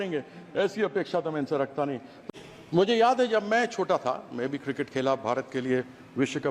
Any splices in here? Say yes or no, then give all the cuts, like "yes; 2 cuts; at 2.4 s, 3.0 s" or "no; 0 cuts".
yes; 1 cut; at 2.2 s